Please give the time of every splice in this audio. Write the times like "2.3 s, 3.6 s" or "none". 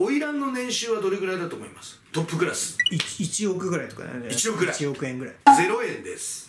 2.0 s, 5.3 s